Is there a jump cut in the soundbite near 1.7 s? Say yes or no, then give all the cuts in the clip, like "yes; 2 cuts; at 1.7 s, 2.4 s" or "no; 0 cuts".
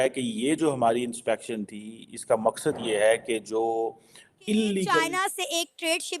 no; 1 cut; at 5.0 s